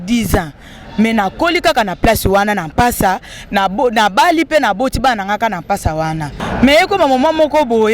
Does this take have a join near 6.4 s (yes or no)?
yes